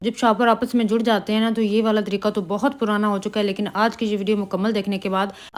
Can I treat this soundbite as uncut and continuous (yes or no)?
yes